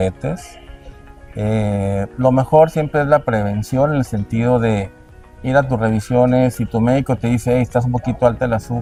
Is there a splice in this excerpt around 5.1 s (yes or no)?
no